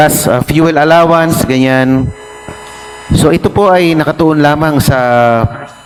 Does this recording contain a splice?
no; 0 cuts

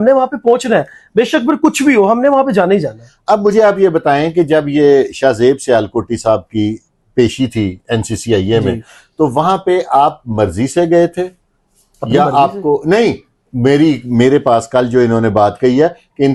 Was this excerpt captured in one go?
yes; 0 cuts

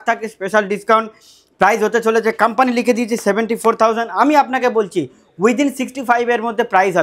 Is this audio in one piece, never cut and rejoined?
yes; 0 cuts

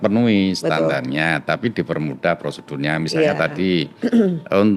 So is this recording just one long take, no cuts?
yes; 0 cuts

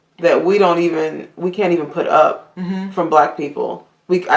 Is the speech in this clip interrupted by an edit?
no; 0 cuts

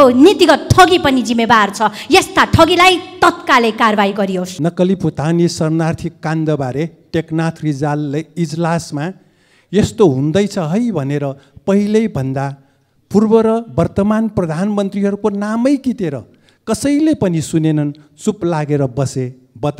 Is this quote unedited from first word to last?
no; 1 cut; at 4.5 s

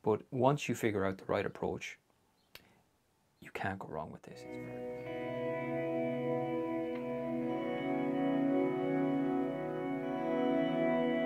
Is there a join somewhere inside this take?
yes; 1 cut; at 4.7 s

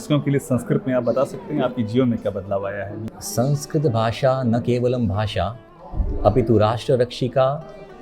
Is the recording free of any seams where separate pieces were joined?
no; 1 cut; at 3.0 s

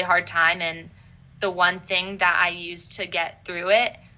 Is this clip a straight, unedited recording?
yes; 0 cuts

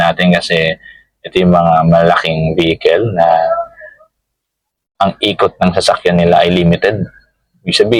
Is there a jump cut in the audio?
no; 0 cuts

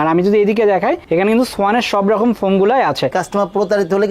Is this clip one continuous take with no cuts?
no; 1 cut; at 3.1 s

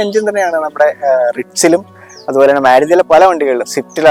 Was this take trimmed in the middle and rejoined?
no; 0 cuts

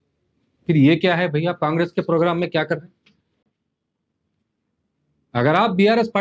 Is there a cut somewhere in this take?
no; 0 cuts

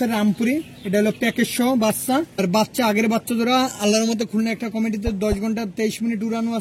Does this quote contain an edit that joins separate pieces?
yes; 1 cut; at 2.4 s

